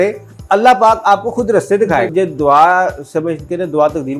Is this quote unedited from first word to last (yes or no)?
no